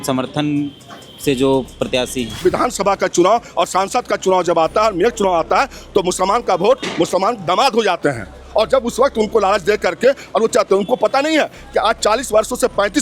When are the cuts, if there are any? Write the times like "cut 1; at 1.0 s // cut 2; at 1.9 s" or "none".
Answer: cut 1; at 2.4 s